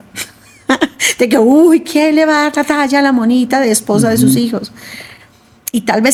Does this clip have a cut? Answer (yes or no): no